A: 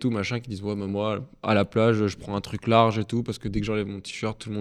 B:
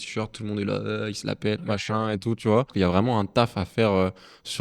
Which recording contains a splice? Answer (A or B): B